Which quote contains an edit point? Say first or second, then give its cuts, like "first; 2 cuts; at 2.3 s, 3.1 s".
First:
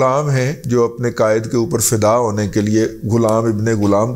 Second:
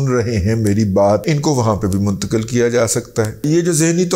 second; 2 cuts; at 1.2 s, 3.5 s